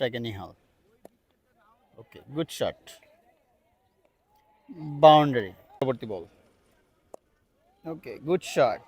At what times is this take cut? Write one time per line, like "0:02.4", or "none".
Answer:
0:05.8